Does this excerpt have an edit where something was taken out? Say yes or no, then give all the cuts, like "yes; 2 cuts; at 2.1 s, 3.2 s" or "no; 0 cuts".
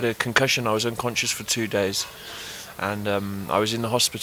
no; 0 cuts